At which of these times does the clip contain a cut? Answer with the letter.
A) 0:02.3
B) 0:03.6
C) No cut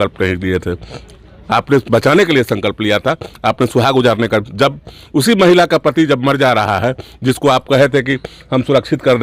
C